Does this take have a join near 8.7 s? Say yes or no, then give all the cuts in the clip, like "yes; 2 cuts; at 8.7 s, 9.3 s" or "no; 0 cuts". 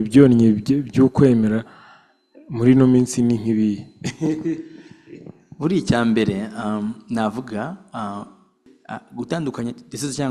yes; 1 cut; at 8.7 s